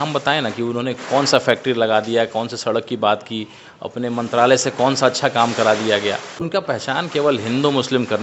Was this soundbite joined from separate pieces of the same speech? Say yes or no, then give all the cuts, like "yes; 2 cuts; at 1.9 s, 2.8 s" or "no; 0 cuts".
yes; 1 cut; at 6.5 s